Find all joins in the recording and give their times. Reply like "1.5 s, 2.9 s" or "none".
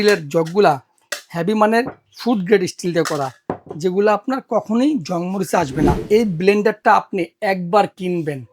6.0 s